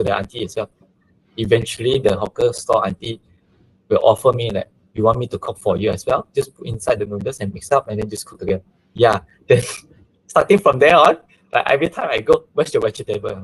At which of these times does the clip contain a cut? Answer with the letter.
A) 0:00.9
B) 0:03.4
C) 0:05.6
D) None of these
A